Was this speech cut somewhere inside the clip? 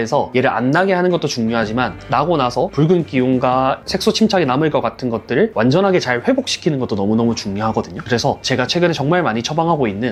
no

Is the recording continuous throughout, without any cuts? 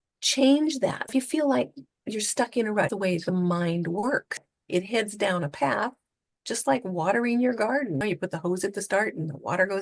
no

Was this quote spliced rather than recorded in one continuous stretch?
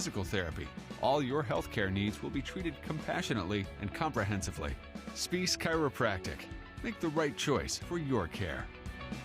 no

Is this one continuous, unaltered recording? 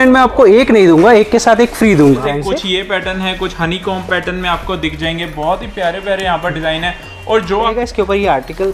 no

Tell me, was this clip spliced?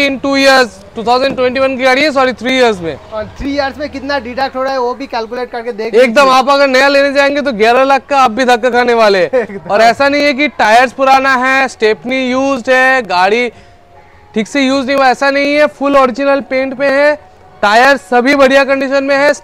no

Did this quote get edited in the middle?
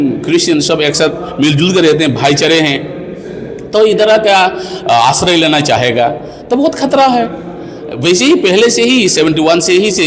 no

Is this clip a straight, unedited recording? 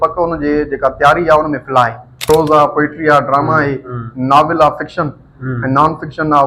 no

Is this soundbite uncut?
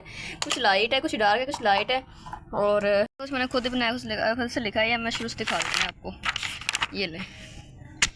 no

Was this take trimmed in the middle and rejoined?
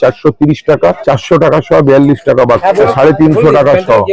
yes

